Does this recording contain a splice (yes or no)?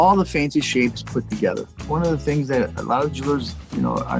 yes